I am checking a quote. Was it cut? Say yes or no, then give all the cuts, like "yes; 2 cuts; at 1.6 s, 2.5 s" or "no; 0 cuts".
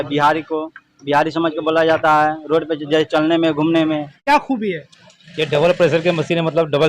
yes; 1 cut; at 4.2 s